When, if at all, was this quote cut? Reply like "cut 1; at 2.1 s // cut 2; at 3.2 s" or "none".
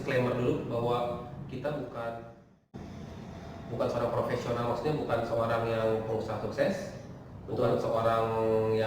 none